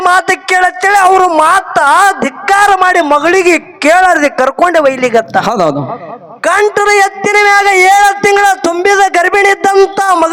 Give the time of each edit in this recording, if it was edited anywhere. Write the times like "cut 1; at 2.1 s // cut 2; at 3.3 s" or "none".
none

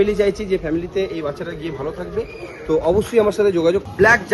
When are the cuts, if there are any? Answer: none

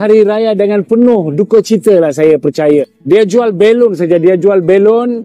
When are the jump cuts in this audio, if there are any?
cut 1; at 2.9 s

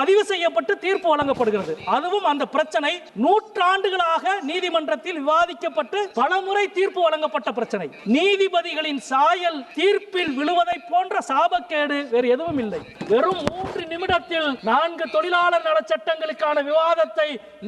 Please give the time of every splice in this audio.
cut 1; at 3.0 s // cut 2; at 6.1 s // cut 3; at 7.9 s // cut 4; at 9.7 s // cut 5; at 12.9 s // cut 6; at 14.6 s

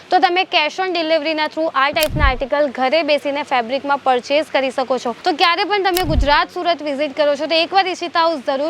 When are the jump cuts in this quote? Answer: cut 1; at 5.1 s

